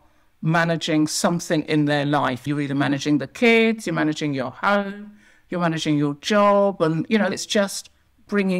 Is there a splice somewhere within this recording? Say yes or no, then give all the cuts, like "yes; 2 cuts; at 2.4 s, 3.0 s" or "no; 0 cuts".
yes; 2 cuts; at 2.5 s, 7.3 s